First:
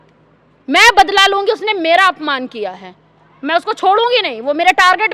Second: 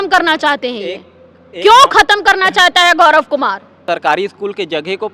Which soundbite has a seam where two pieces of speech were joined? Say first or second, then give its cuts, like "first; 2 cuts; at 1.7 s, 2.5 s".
second; 1 cut; at 3.8 s